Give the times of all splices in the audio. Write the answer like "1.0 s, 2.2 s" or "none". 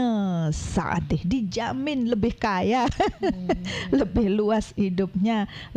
none